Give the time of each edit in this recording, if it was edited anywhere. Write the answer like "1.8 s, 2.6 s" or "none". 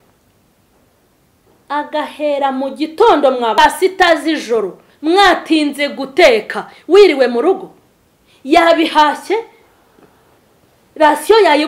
3.6 s